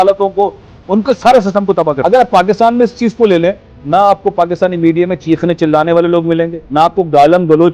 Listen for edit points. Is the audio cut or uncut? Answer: cut